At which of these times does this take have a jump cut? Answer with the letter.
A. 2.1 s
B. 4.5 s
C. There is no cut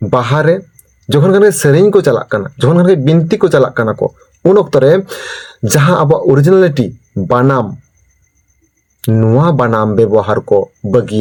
C